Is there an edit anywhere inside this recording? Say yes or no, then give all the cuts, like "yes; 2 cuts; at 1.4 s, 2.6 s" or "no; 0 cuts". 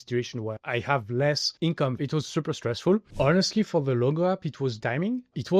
yes; 1 cut; at 3.1 s